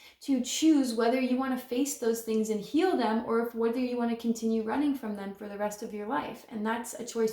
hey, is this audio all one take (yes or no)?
yes